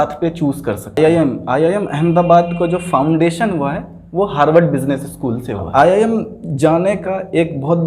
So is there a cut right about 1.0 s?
yes; 2 cuts; at 1.0 s, 5.5 s

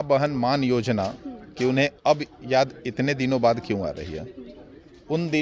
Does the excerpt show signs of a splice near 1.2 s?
no; 0 cuts

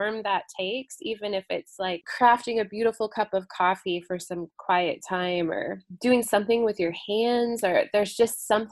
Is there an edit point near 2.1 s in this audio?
yes; 1 cut; at 2.1 s

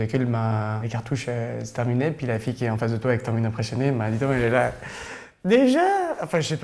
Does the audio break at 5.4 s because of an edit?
no; 1 cut; at 0.9 s

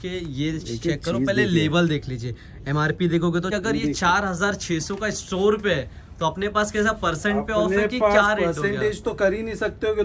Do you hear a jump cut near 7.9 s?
no; 1 cut; at 3.5 s

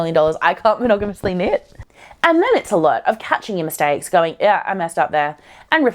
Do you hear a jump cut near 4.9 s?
no; 1 cut; at 1.7 s

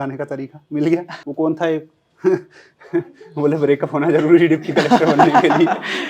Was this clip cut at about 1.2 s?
yes; 1 cut; at 1.2 s

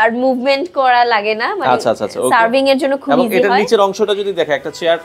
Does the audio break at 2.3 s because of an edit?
no; 0 cuts

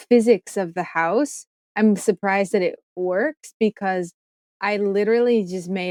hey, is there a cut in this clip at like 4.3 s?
no; 0 cuts

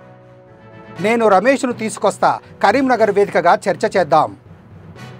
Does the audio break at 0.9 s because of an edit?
yes; 1 cut; at 0.9 s

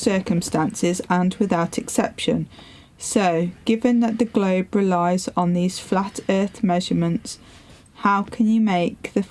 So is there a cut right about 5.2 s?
no; 0 cuts

